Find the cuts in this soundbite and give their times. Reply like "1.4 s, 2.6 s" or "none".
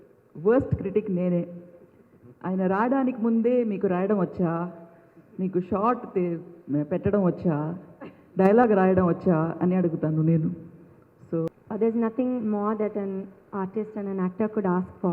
11.5 s

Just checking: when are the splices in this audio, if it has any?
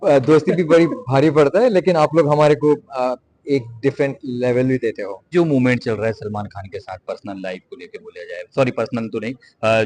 5.3 s

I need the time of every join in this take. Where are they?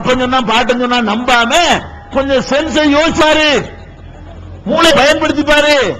3.2 s, 4.9 s

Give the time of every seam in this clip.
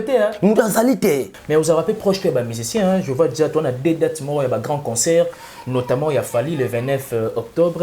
1.3 s

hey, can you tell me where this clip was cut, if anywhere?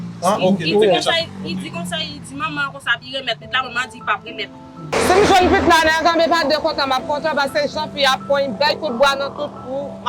4.9 s

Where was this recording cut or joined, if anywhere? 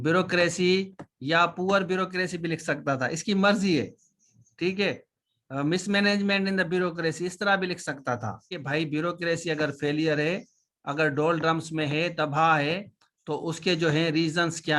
8.6 s

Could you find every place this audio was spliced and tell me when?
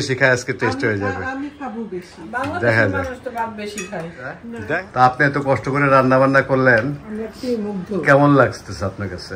4.5 s

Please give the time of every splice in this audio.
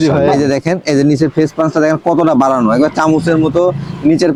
none

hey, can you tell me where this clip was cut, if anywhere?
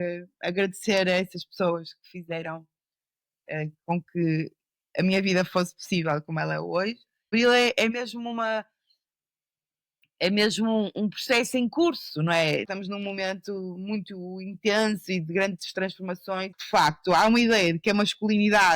7.3 s, 12.6 s, 16.5 s

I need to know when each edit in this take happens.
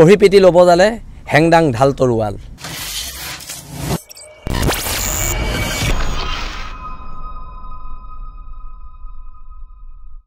none

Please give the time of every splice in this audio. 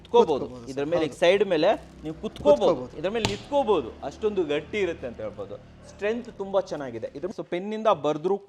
7.3 s

